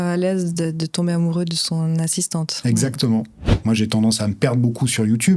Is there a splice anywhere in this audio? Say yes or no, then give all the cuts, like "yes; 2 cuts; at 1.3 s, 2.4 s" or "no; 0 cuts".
yes; 1 cut; at 3.4 s